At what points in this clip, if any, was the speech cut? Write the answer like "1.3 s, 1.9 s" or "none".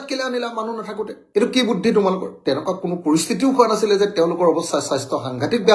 2.3 s